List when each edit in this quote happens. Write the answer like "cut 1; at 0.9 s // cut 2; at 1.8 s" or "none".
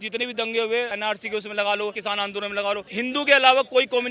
cut 1; at 0.9 s // cut 2; at 2.0 s // cut 3; at 2.9 s